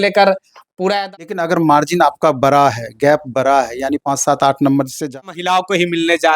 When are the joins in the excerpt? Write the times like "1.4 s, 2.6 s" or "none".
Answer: 1.0 s, 5.1 s

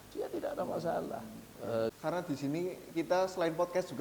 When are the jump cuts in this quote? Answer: 1.9 s

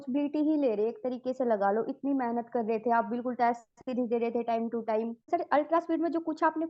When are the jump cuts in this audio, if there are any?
5.3 s

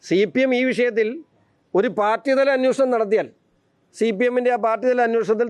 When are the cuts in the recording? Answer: none

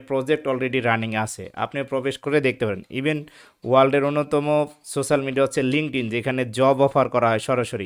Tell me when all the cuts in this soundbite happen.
none

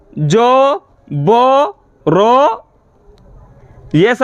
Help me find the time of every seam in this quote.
none

